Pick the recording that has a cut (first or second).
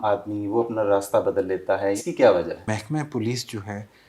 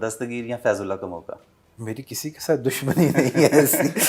first